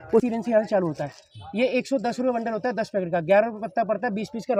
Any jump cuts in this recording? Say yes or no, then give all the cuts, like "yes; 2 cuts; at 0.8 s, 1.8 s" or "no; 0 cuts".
no; 0 cuts